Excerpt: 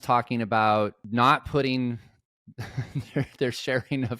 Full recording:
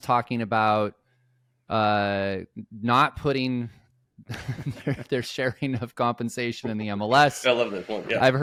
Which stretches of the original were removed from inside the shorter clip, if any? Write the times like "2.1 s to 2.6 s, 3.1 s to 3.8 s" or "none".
1.0 s to 2.7 s